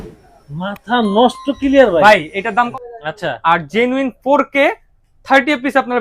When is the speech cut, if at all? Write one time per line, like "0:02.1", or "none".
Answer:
0:02.7